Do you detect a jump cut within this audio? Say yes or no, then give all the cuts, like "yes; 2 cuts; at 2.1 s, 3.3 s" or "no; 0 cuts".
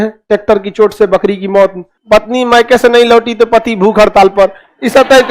yes; 1 cut; at 1.9 s